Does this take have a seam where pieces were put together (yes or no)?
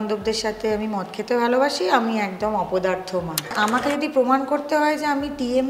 yes